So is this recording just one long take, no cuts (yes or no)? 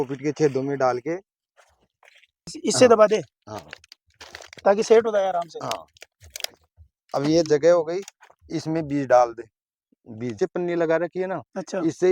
no